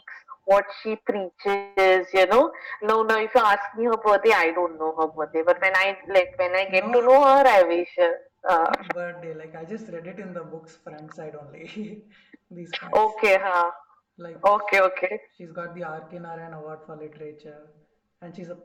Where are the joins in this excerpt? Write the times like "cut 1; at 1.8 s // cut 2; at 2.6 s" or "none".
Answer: none